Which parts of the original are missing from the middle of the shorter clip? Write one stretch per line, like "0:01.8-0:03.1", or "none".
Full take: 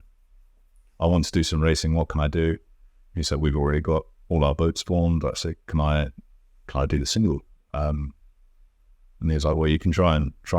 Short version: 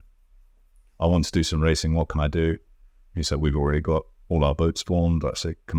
none